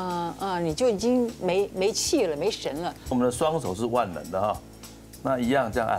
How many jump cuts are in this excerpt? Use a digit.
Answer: 1